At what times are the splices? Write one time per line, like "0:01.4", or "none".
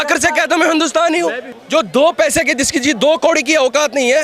0:01.5